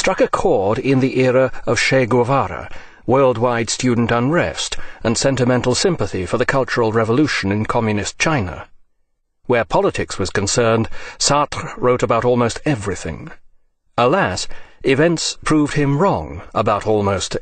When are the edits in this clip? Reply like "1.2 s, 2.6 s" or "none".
15.1 s